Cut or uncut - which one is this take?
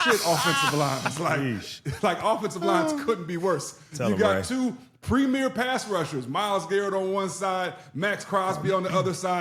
uncut